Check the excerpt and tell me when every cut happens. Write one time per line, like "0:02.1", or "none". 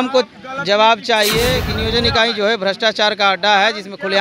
0:01.7